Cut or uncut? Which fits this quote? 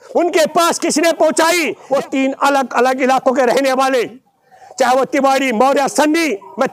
cut